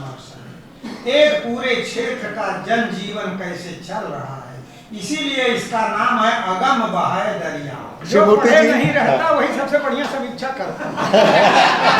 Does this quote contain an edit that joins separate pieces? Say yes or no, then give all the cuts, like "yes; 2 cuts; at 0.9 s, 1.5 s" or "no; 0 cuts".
yes; 1 cut; at 8.0 s